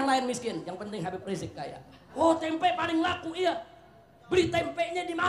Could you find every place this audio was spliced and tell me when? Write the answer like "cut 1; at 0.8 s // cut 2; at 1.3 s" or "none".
cut 1; at 2.0 s